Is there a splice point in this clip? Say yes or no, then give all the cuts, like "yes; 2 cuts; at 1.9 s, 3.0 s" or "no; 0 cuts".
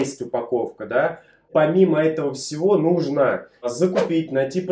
yes; 2 cuts; at 1.5 s, 3.7 s